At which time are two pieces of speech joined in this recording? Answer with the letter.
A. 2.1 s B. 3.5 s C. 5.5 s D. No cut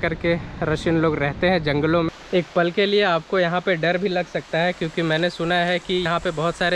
A